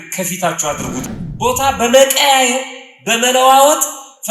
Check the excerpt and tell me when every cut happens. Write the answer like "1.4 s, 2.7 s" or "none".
1.0 s